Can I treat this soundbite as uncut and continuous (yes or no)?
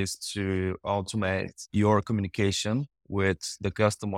no